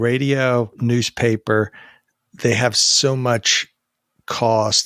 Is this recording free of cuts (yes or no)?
yes